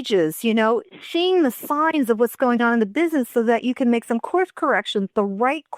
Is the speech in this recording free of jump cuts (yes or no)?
yes